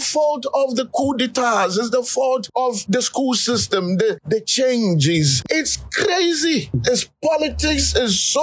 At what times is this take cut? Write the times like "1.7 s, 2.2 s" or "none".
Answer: 5.4 s